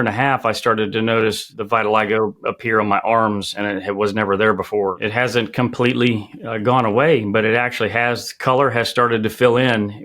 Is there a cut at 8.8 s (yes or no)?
no